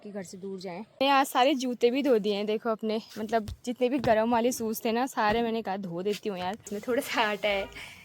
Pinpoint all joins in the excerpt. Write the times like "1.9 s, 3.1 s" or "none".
0.9 s, 6.8 s